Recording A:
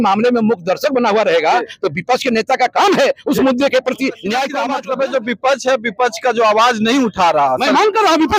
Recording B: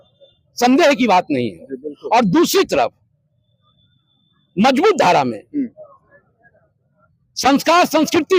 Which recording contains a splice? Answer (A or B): A